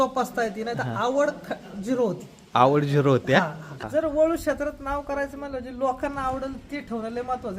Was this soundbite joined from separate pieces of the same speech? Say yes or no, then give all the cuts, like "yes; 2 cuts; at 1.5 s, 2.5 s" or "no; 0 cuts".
yes; 1 cut; at 3.8 s